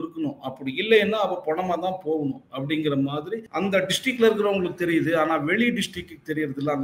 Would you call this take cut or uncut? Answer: cut